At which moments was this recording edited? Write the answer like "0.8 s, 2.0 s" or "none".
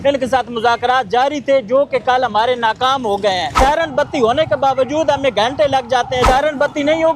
3.5 s, 6.2 s